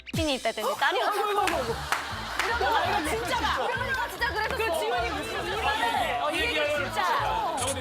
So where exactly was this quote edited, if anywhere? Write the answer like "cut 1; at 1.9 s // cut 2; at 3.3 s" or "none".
cut 1; at 5.3 s